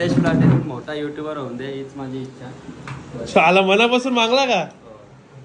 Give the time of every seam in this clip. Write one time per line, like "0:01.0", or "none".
none